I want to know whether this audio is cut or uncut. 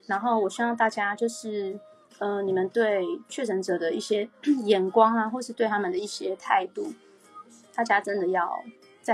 uncut